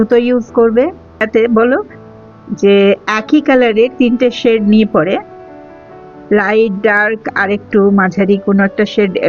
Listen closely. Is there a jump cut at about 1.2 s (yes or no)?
yes